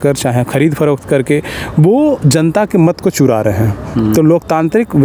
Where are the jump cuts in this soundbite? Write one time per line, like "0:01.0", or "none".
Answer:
none